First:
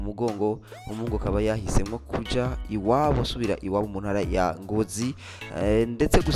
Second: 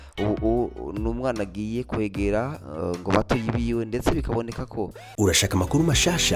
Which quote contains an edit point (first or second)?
second